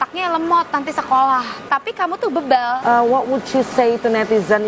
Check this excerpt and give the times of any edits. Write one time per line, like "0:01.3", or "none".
0:01.7
0:02.8